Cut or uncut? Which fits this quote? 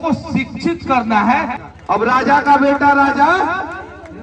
cut